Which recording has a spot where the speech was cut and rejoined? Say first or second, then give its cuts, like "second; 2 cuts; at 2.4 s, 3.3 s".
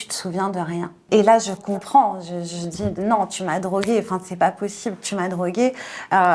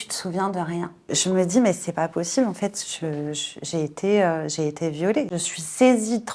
second; 2 cuts; at 0.9 s, 5.3 s